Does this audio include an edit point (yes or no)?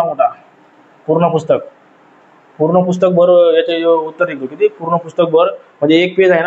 no